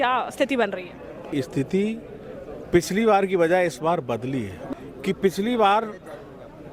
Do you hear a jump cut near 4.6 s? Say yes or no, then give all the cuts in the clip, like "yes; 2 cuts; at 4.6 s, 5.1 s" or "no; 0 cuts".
yes; 2 cuts; at 1.3 s, 4.6 s